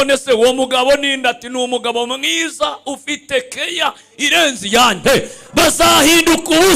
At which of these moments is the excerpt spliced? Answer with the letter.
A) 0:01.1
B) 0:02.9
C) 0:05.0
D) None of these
C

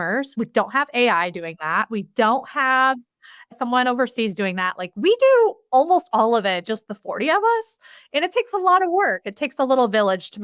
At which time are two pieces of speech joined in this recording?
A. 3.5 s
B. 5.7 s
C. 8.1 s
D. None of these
A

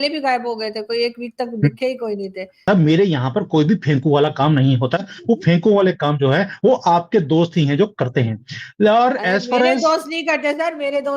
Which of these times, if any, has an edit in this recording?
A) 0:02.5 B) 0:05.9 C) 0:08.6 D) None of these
A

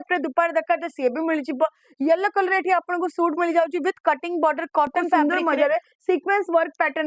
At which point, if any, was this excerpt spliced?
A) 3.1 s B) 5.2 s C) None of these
B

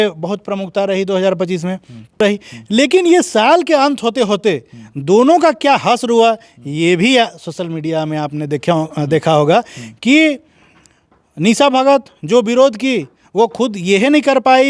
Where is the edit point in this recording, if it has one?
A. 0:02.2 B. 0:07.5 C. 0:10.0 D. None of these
A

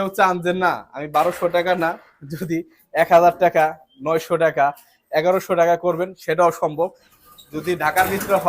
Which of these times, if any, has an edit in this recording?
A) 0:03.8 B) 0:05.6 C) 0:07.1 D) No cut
C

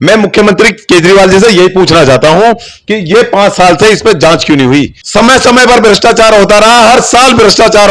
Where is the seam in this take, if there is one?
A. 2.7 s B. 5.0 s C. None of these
B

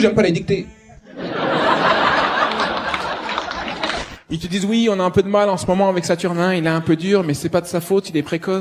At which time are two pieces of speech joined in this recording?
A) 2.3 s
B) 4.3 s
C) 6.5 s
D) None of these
D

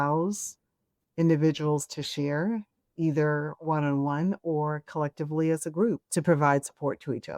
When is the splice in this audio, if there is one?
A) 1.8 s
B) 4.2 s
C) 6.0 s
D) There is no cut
C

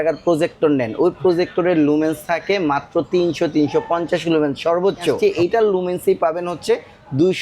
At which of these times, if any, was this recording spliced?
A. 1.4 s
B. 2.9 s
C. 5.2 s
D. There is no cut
C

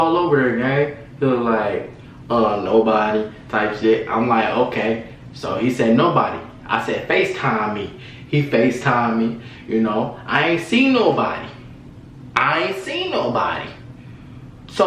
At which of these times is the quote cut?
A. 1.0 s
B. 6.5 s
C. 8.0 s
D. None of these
D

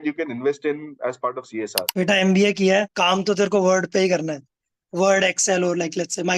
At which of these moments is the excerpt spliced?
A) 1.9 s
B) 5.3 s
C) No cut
A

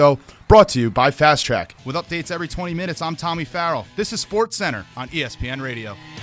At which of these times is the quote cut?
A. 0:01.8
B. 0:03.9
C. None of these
A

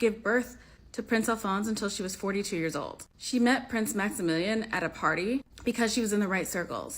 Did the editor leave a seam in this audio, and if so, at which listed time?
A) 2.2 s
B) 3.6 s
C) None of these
B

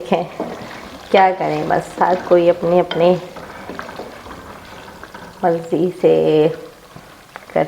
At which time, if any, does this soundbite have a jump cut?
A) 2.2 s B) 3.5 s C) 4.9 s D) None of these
D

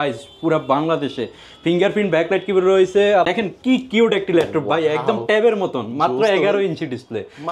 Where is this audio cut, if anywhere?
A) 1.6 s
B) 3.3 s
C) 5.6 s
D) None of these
B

